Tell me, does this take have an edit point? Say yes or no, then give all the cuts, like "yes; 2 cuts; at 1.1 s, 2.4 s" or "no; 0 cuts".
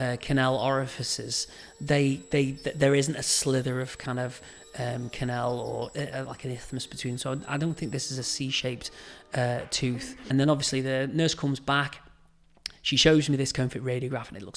yes; 1 cut; at 10.1 s